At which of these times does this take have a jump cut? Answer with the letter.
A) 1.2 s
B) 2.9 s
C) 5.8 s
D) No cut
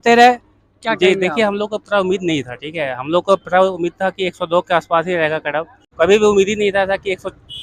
C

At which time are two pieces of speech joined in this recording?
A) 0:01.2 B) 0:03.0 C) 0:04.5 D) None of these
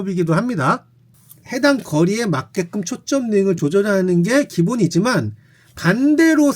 A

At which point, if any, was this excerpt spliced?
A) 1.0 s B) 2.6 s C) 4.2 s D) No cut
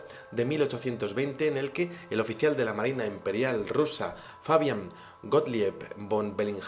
A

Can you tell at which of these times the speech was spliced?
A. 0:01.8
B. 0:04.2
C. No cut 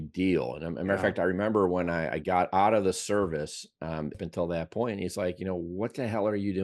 B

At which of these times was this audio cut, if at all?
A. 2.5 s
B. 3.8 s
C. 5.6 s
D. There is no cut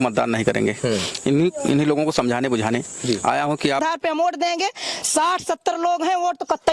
B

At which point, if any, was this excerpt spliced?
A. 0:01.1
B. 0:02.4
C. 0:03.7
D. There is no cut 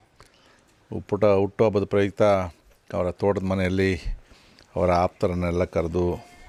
D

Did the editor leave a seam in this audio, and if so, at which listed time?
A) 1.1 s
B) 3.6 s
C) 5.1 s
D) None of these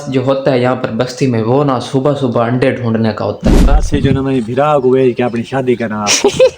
B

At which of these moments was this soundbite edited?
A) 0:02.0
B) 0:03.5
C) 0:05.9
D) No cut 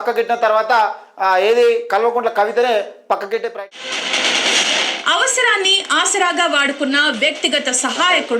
B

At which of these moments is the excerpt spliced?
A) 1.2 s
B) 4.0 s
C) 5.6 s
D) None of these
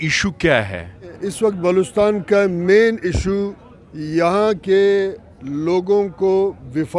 A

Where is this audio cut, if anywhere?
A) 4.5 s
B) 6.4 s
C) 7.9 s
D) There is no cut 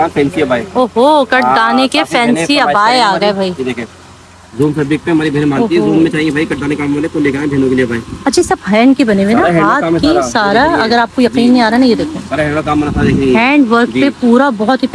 D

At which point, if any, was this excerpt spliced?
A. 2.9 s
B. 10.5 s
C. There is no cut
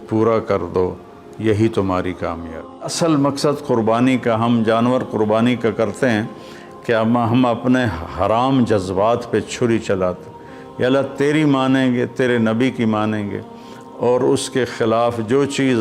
A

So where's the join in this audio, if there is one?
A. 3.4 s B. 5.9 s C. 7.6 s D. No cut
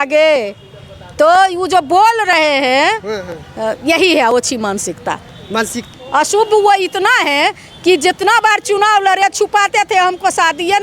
B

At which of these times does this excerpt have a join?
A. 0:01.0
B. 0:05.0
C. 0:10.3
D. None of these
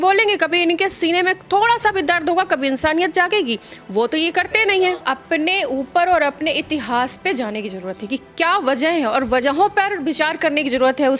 B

